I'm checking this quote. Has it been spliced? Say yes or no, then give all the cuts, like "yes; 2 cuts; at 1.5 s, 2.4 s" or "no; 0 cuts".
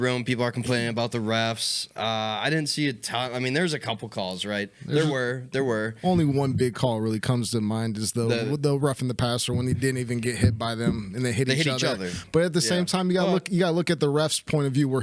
no; 0 cuts